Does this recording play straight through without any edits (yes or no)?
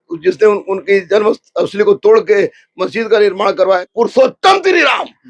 no